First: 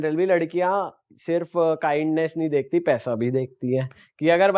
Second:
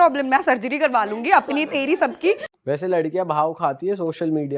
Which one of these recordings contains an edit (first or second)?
second